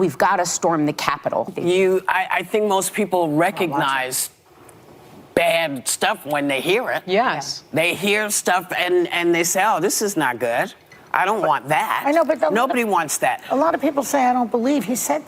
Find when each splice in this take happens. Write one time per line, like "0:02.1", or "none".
0:01.5